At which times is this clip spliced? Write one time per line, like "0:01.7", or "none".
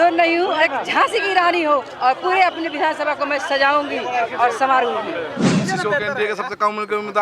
0:05.6